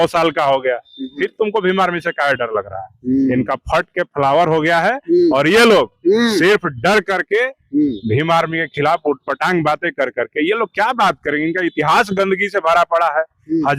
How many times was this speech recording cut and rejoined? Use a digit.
0